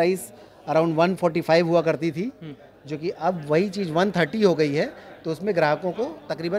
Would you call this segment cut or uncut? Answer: uncut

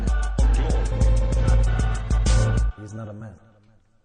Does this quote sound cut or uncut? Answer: cut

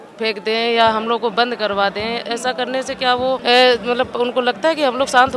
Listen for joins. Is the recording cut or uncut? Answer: cut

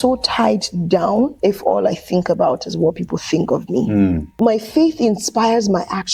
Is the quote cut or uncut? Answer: cut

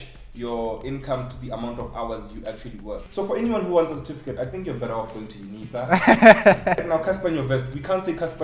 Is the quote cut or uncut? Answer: cut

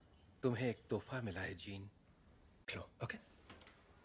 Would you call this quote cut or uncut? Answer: uncut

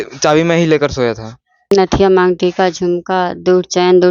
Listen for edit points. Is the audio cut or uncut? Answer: cut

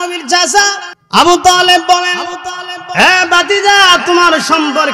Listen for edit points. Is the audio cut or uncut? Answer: cut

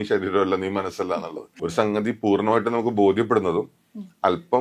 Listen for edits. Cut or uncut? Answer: cut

